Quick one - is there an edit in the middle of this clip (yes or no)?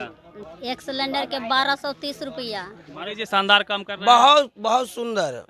yes